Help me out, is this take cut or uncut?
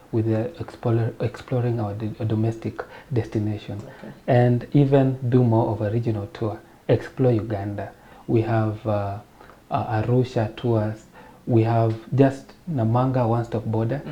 cut